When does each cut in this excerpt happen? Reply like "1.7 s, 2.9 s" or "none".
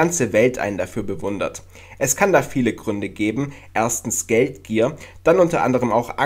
1.3 s